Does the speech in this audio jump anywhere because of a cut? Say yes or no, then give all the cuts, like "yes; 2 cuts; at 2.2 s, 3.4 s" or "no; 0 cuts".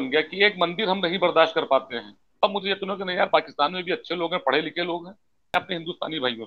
yes; 2 cuts; at 2.3 s, 5.5 s